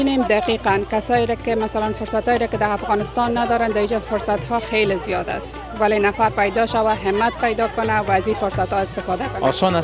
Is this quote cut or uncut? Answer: uncut